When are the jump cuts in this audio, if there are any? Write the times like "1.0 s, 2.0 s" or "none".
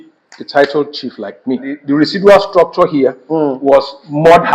1.7 s

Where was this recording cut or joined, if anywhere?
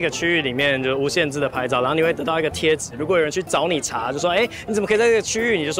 none

